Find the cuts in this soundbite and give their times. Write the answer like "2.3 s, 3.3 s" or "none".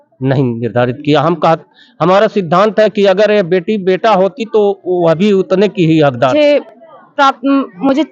6.3 s